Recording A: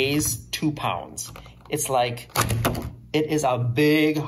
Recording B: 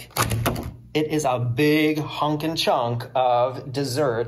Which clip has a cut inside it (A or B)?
B